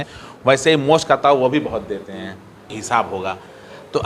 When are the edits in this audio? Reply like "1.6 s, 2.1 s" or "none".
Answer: 2.7 s